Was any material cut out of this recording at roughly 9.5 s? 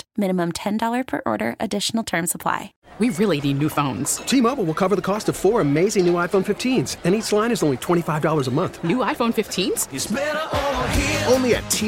no; 1 cut; at 2.8 s

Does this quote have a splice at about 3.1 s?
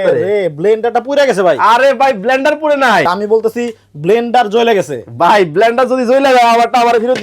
yes; 1 cut; at 3.1 s

